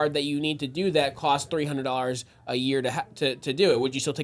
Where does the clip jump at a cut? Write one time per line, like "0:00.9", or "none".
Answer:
none